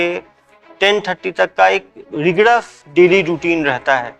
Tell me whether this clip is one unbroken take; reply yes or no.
no